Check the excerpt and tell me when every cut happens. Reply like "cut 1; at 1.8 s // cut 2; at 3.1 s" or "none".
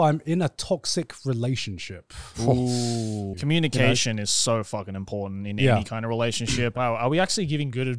cut 1; at 3.3 s // cut 2; at 6.7 s